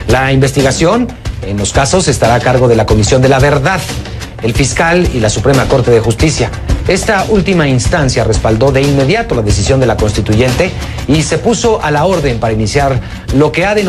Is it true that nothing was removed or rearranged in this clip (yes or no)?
no